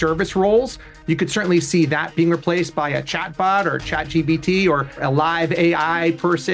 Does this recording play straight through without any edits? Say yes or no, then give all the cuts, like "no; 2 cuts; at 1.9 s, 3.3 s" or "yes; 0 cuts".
no; 1 cut; at 5.0 s